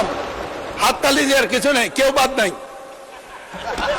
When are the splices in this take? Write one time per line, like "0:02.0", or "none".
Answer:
none